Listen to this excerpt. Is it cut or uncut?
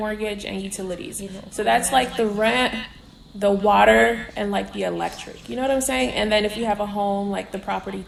uncut